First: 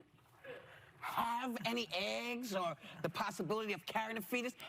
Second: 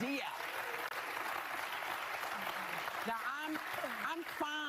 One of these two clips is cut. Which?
second; 1 cut; at 0.9 s

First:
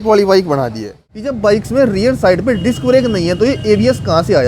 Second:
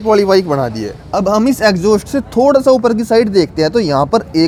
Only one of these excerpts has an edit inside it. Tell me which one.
first; 1 cut; at 1.0 s

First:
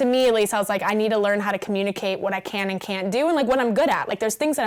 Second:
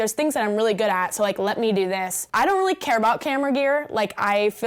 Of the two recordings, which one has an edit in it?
second; 1 cut; at 2.2 s

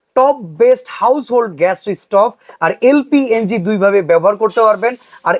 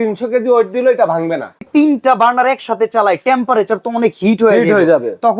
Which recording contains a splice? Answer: second; 1 cut; at 1.6 s

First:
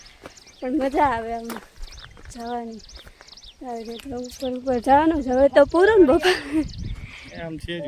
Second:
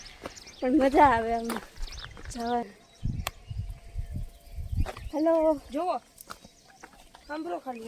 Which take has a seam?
second; 1 cut; at 2.6 s

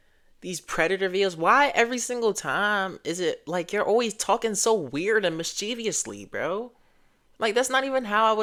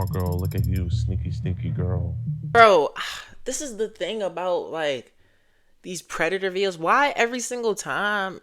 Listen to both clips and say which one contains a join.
second; 1 cut; at 2.5 s

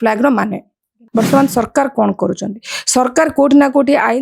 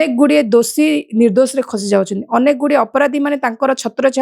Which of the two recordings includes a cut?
first; 1 cut; at 1.0 s

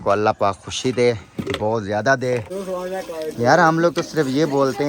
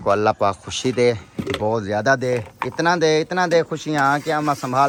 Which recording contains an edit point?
first; 1 cut; at 2.5 s

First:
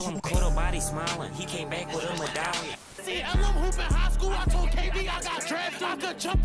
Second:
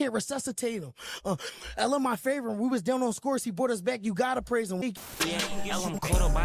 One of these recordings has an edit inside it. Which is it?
second; 1 cut; at 4.8 s

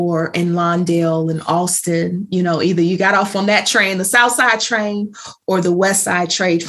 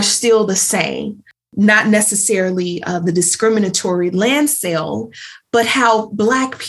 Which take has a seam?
second; 1 cut; at 1.5 s

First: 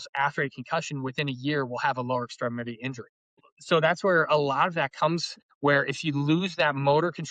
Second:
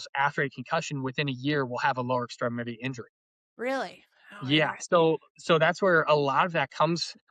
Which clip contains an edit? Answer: first; 1 cut; at 3.5 s

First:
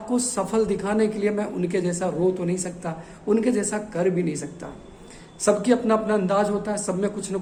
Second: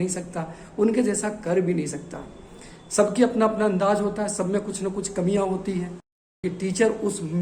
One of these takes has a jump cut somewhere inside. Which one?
second; 1 cut; at 6.0 s

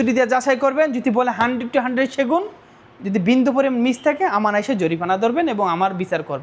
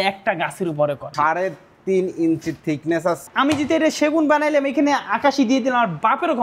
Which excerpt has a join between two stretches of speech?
second; 2 cuts; at 1.1 s, 3.2 s

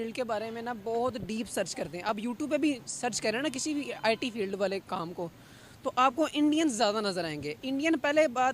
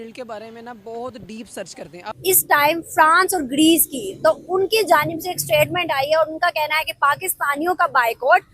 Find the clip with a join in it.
second; 1 cut; at 2.0 s

